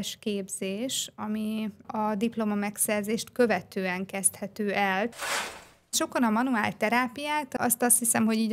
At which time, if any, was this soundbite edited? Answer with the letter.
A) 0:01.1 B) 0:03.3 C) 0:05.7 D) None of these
C